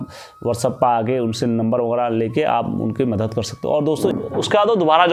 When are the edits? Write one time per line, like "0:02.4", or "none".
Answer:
0:04.1